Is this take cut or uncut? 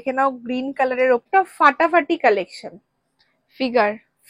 cut